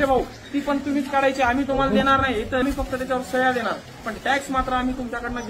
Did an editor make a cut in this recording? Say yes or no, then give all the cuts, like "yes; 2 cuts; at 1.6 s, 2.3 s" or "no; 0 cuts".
yes; 1 cut; at 2.6 s